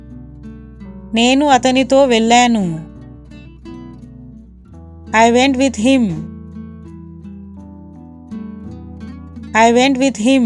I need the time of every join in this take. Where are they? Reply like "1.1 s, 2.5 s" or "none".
1.1 s, 2.8 s, 5.1 s, 6.9 s, 9.5 s